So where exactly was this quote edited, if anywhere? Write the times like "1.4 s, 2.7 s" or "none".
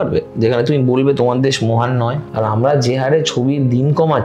2.2 s